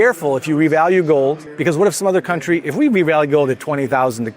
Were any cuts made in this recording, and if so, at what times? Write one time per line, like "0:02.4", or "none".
0:01.5